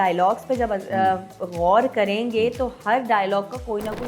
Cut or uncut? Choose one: uncut